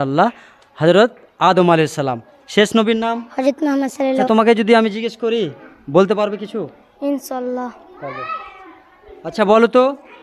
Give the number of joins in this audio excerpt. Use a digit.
1